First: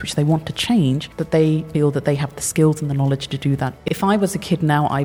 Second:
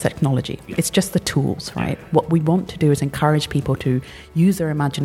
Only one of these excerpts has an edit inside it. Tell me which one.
first; 2 cuts; at 1.5 s, 3.8 s

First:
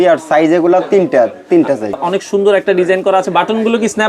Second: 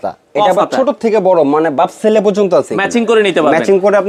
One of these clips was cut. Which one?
first; 1 cut; at 2.0 s

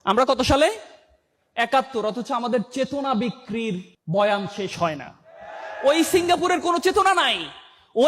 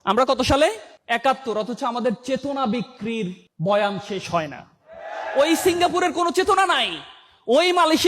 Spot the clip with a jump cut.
second; 1 cut; at 0.9 s

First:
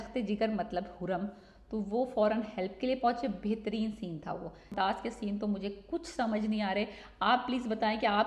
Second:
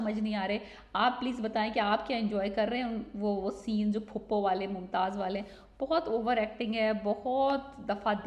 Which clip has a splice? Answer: first; 1 cut; at 4.7 s

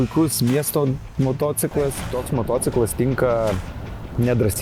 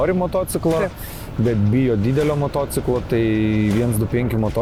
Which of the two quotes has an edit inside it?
first; 1 cut; at 2.1 s

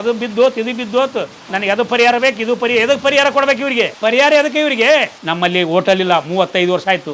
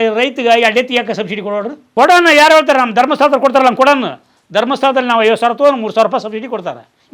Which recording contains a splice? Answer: first; 1 cut; at 5.2 s

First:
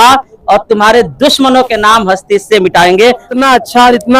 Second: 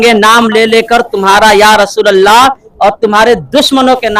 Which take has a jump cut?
first; 1 cut; at 3.3 s

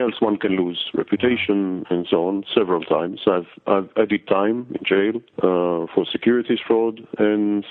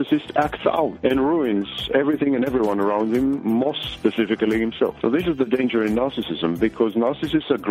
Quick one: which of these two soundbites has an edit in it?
second; 1 cut; at 0.9 s

